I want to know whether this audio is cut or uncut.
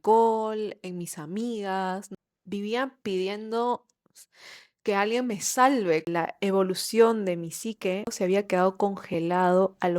cut